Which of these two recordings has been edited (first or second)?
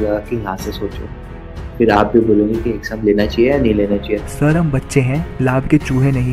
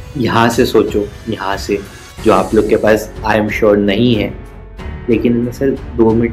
first